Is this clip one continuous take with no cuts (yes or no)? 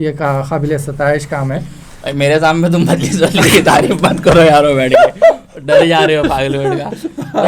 yes